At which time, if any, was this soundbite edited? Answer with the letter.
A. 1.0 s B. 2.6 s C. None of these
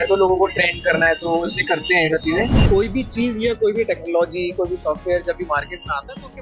B